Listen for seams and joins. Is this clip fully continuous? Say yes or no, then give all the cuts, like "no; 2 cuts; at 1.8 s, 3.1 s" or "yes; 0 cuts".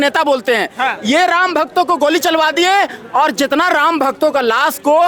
yes; 0 cuts